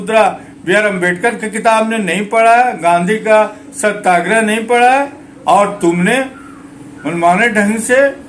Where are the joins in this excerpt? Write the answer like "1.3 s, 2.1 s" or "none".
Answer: none